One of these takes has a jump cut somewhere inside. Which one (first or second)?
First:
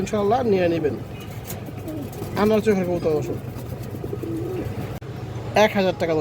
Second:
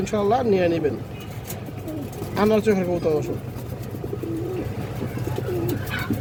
first